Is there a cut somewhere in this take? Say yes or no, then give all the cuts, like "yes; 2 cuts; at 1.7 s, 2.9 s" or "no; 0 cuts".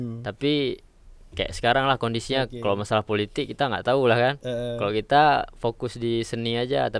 no; 0 cuts